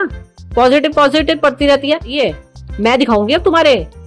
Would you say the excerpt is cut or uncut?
cut